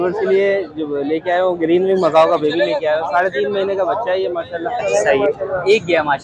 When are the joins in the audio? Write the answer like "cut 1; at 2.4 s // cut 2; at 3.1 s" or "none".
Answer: cut 1; at 4.8 s